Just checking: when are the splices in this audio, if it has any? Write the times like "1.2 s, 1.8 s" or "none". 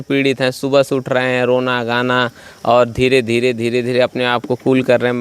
none